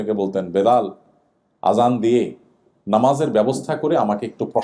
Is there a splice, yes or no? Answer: no